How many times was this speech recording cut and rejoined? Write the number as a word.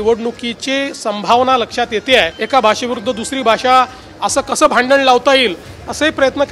one